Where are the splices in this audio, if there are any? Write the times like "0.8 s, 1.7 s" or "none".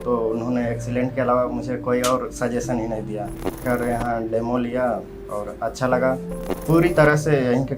3.6 s, 6.5 s